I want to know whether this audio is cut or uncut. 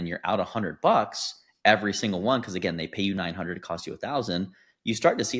uncut